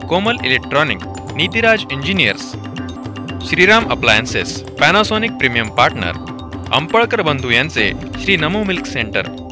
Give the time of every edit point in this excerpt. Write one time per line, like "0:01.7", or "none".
none